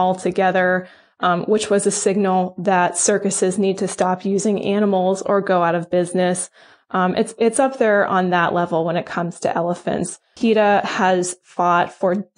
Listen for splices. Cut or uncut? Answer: uncut